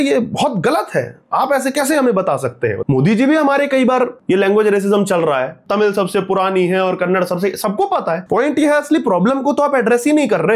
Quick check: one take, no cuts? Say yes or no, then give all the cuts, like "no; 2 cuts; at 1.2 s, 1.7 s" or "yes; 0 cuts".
no; 4 cuts; at 2.8 s, 4.2 s, 5.6 s, 8.2 s